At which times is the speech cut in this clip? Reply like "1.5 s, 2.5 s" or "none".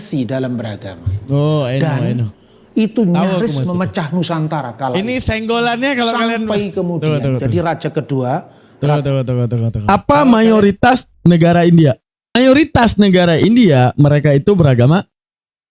9.7 s, 12.4 s

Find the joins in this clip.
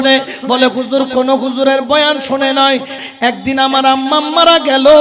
3.0 s

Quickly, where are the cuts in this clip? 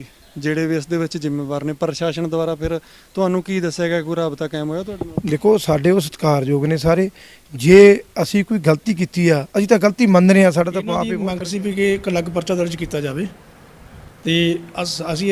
11.1 s

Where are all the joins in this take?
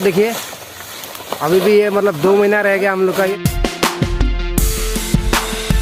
none

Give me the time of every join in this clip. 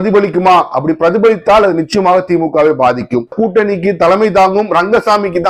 3.4 s

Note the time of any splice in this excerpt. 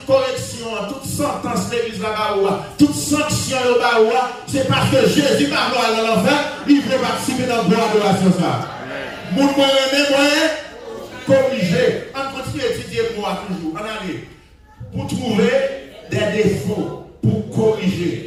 none

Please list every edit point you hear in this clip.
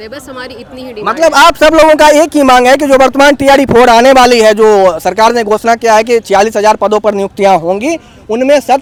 none

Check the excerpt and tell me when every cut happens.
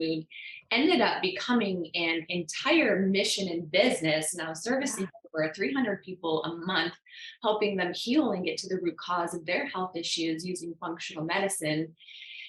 none

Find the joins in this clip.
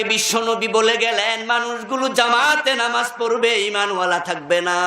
none

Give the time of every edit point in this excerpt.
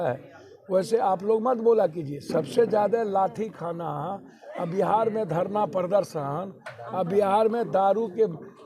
none

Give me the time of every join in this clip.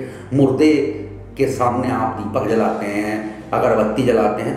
none

